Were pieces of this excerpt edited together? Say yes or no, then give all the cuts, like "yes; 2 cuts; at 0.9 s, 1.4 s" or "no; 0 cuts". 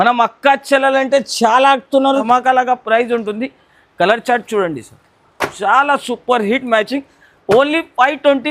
yes; 1 cut; at 2.2 s